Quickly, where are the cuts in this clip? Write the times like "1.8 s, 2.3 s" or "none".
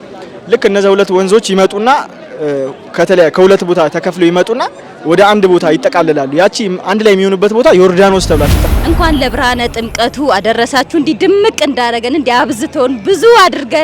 8.6 s